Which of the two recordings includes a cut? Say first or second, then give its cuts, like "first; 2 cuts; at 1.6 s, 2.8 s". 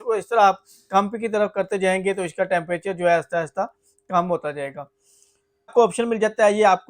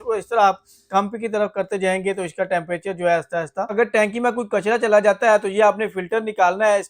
second; 1 cut; at 3.7 s